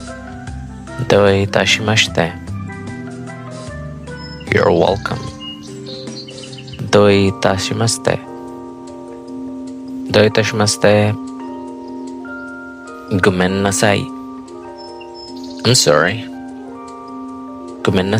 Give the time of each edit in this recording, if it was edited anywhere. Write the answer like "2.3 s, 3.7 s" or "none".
1.0 s, 2.3 s, 4.2 s, 8.2 s, 9.9 s, 11.2 s, 13.1 s, 14.2 s, 15.6 s